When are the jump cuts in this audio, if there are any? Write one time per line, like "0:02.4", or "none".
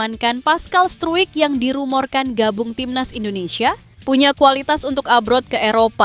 0:03.9